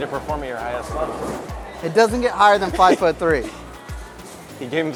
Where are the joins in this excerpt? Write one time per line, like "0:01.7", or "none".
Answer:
none